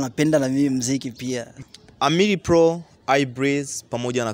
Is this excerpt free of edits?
no; 1 cut; at 1.6 s

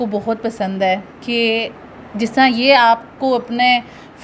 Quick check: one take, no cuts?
yes; 0 cuts

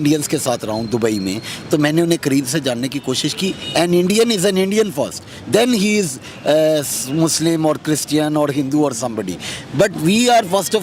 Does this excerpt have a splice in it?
no; 0 cuts

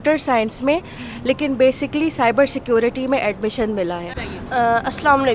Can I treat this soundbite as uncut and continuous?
no; 1 cut; at 4.2 s

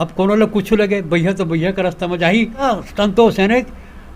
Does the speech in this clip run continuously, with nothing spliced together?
no; 1 cut; at 2.6 s

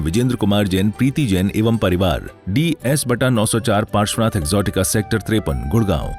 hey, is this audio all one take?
no; 1 cut; at 2.3 s

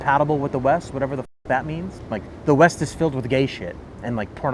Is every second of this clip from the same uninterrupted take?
no; 1 cut; at 2.0 s

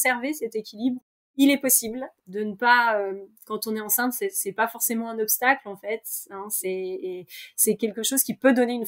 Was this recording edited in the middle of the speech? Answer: yes; 1 cut; at 1.0 s

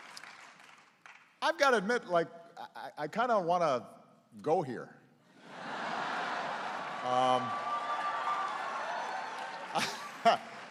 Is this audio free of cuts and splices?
yes; 0 cuts

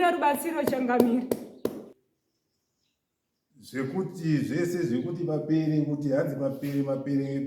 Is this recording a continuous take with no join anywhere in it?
no; 1 cut; at 2.0 s

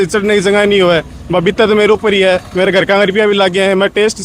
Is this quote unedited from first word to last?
yes; 0 cuts

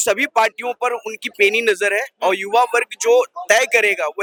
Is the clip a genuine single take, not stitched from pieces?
yes; 0 cuts

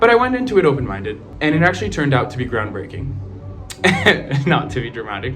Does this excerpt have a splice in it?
yes; 1 cut; at 1.3 s

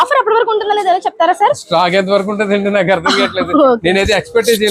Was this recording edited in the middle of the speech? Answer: no; 0 cuts

